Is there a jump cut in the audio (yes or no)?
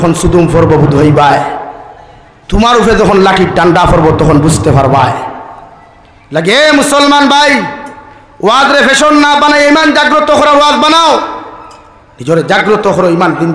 no